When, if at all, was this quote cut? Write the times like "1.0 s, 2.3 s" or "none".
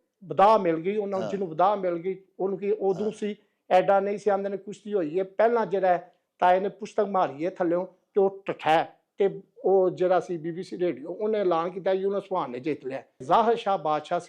13.2 s

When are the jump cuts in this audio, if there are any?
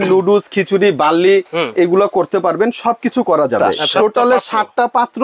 3.6 s

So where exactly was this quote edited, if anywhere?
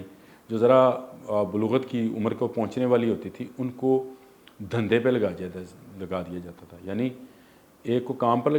none

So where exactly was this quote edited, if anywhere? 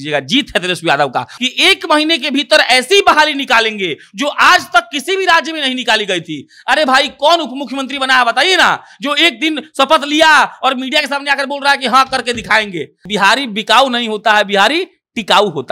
1.3 s, 13.0 s

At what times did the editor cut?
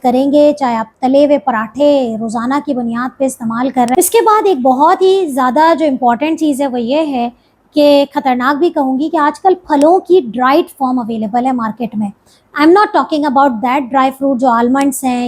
4.0 s

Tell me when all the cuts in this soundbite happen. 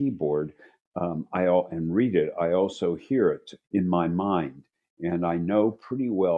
3.5 s

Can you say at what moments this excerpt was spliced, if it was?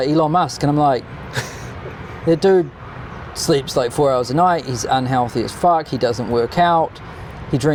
none

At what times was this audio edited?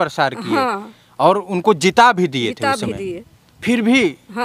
none

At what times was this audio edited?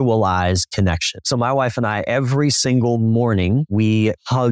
1.1 s, 3.8 s

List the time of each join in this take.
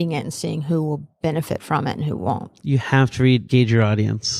3.4 s

